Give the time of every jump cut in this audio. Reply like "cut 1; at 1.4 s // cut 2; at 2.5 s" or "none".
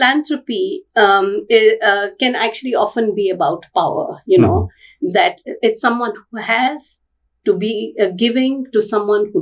none